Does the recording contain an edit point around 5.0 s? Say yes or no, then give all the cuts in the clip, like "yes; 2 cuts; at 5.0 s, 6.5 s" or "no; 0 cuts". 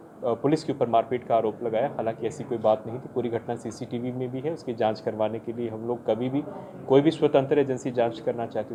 no; 0 cuts